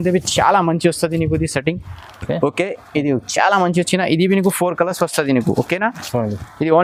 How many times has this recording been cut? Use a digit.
0